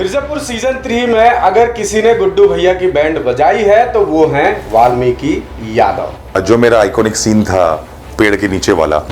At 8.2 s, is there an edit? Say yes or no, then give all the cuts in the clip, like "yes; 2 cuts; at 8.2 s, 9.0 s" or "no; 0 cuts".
no; 1 cut; at 6.4 s